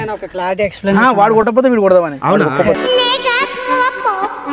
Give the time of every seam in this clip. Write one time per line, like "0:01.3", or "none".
0:02.8